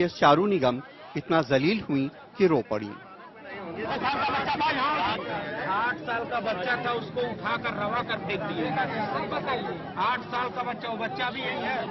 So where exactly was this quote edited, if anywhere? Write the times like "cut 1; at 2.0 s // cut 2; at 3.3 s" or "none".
cut 1; at 10.1 s